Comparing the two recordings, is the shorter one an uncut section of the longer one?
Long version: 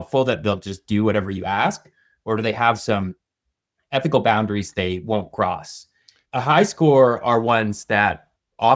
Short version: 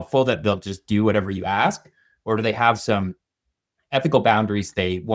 yes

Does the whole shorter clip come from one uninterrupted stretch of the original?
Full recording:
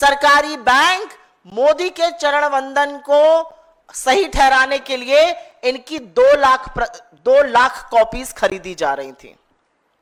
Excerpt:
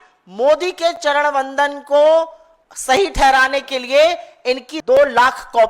no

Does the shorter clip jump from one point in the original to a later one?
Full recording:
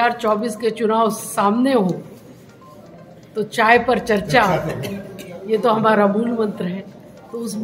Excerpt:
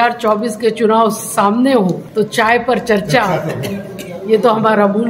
yes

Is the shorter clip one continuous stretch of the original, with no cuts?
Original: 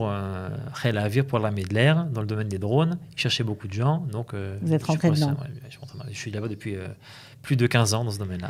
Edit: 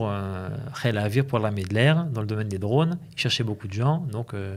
yes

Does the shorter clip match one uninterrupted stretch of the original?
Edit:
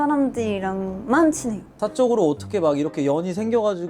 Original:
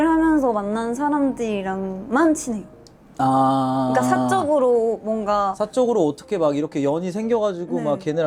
no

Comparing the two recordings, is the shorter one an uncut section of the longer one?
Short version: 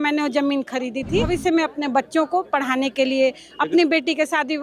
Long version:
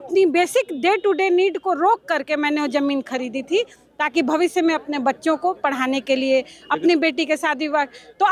no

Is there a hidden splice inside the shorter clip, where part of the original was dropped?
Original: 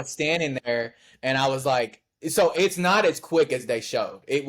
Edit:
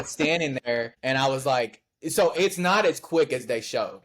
yes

